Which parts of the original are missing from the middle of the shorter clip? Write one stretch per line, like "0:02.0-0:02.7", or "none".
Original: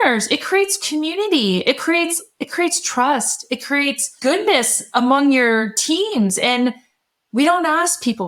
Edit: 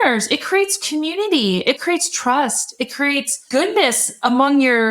0:01.8-0:02.5